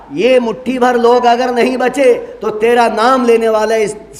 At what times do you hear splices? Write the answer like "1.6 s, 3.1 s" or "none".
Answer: none